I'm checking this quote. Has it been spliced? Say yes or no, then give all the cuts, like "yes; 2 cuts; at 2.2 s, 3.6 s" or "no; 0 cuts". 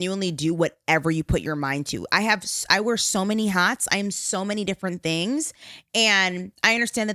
no; 0 cuts